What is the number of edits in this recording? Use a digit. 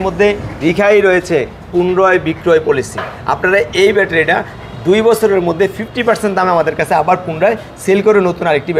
0